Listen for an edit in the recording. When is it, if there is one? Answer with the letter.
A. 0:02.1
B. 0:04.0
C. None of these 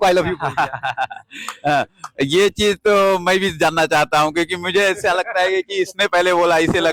C